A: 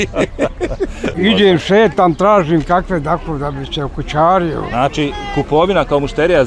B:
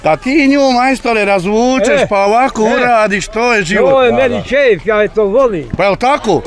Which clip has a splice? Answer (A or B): A